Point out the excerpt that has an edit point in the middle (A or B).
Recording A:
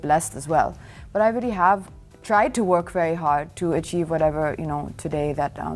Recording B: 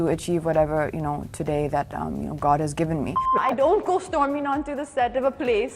B